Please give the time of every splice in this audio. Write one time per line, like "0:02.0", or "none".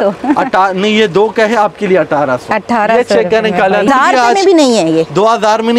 0:03.9